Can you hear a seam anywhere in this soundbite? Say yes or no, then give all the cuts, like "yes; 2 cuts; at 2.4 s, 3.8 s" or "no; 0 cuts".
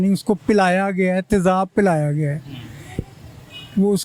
no; 0 cuts